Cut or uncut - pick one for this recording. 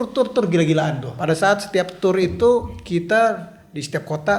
cut